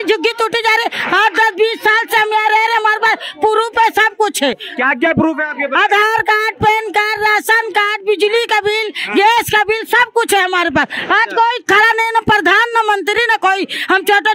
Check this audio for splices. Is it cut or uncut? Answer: uncut